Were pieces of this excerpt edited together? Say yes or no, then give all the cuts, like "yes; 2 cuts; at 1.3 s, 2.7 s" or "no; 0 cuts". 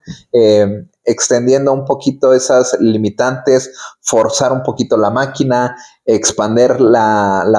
no; 0 cuts